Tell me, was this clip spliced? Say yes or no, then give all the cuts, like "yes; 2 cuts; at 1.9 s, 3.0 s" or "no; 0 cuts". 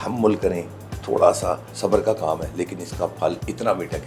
yes; 1 cut; at 1.7 s